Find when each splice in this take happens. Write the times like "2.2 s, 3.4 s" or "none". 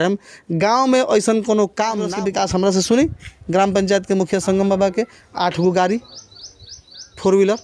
2.1 s

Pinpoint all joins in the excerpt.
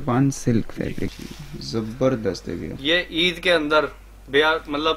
1.2 s

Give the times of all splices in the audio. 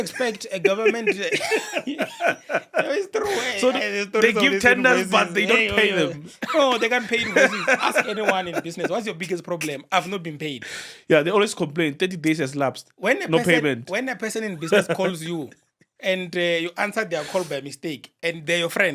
none

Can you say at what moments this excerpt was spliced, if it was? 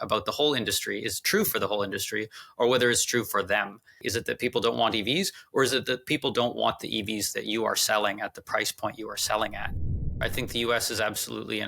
4.0 s, 10.2 s

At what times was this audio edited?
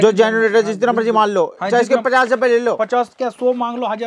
none

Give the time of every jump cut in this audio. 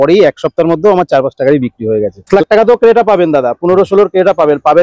2.3 s

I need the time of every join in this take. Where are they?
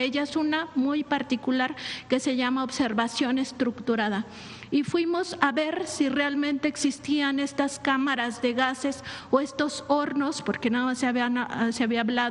none

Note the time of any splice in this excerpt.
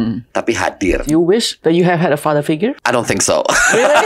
1.0 s, 2.8 s

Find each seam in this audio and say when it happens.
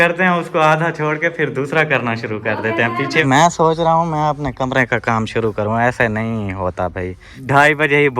3.2 s, 7.4 s

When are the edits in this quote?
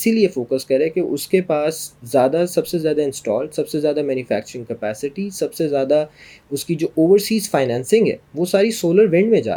none

